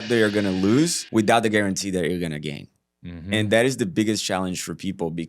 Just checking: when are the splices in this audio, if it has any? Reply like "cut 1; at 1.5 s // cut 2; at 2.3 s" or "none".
cut 1; at 1.0 s